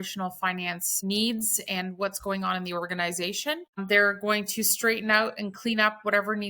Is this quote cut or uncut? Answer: cut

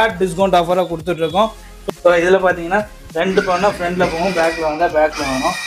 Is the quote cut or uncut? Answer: cut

